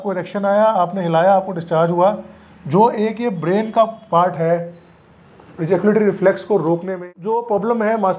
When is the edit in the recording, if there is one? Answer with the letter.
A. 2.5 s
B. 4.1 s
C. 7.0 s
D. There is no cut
C